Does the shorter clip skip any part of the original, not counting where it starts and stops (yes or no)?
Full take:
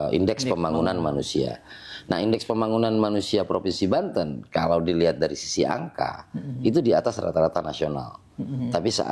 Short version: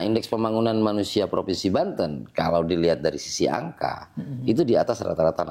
no